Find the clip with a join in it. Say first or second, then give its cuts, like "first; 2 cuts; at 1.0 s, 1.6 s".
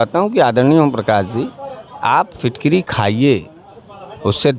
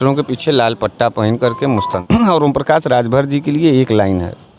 second; 1 cut; at 2.0 s